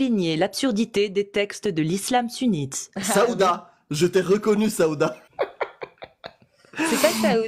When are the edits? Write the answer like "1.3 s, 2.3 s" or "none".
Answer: 3.0 s, 5.2 s